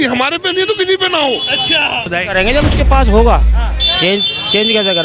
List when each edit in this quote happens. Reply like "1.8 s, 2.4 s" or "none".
2.1 s